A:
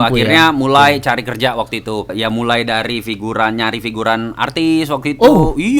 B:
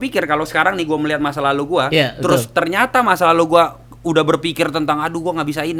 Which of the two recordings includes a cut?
A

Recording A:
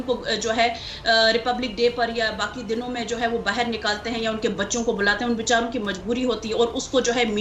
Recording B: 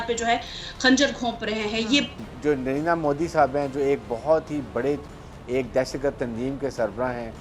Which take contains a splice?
B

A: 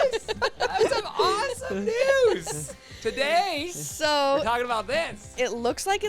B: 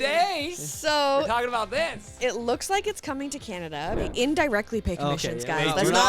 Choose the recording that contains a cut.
B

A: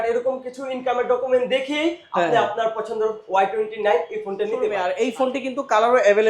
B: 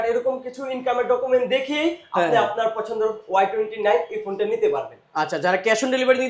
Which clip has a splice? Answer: A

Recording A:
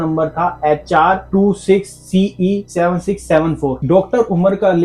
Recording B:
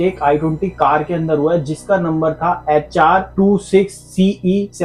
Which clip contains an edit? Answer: A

